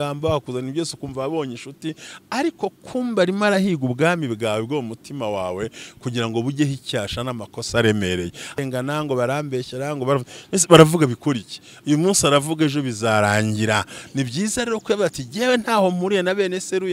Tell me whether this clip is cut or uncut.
cut